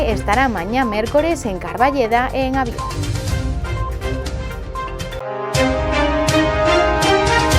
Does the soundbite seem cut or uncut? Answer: cut